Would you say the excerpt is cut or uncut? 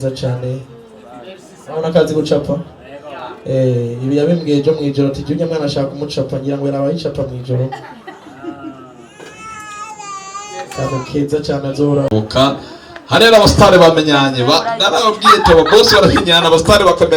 cut